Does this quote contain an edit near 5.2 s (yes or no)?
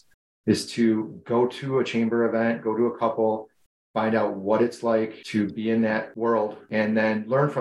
yes